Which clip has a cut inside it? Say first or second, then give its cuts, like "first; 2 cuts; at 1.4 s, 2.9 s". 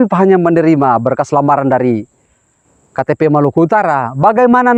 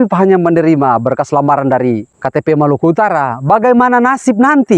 second; 1 cut; at 2.1 s